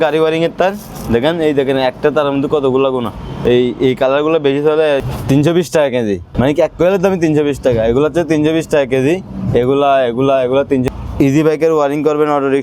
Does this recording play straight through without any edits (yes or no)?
no